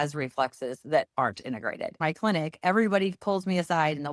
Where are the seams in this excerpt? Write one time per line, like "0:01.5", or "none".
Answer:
0:02.0